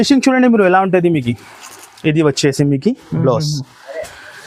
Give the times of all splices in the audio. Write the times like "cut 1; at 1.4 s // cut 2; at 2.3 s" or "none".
none